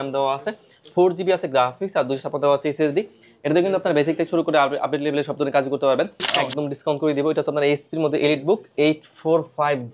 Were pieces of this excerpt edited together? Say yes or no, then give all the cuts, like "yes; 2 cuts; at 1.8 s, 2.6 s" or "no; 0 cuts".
yes; 1 cut; at 6.2 s